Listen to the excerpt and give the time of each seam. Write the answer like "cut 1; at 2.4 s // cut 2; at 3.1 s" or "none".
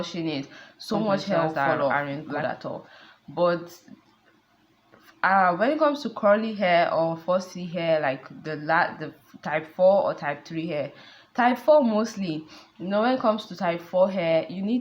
cut 1; at 1.9 s